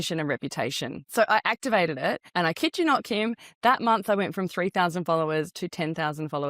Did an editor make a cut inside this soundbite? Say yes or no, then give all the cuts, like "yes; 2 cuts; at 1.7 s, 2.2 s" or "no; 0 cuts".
yes; 2 cuts; at 1.0 s, 2.2 s